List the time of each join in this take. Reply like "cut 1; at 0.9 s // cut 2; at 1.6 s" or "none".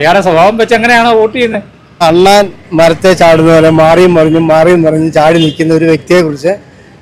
cut 1; at 2.0 s